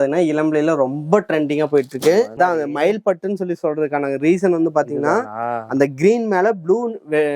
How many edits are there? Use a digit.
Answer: 1